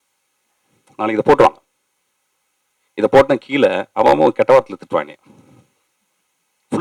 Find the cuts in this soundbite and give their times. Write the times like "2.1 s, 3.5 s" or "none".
none

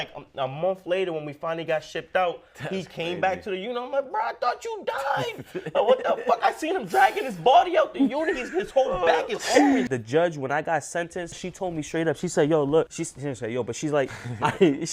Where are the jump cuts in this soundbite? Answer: 9.9 s, 11.4 s, 13.0 s

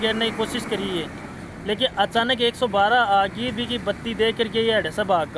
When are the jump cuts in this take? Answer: none

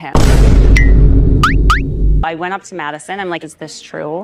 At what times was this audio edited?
none

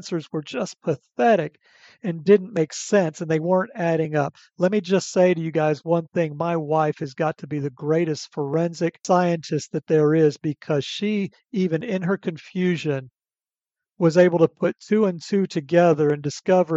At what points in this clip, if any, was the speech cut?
9.0 s

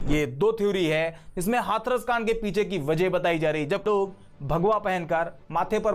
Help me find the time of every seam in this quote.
3.8 s

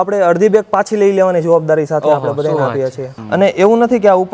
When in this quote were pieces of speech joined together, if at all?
3.1 s

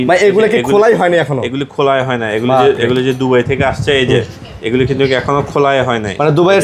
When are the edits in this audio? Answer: none

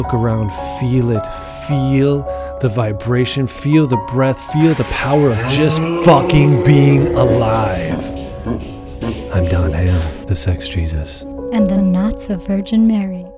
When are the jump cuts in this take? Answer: none

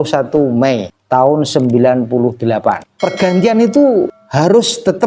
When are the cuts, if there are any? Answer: 0.9 s, 2.9 s, 4.2 s

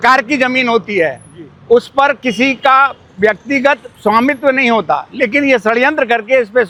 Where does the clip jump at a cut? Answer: none

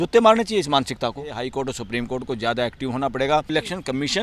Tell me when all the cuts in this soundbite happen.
1.4 s, 3.5 s

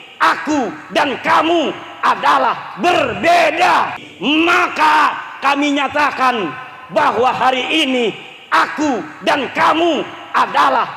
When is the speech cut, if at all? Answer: 4.1 s

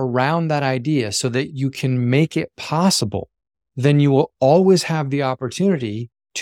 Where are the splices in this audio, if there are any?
none

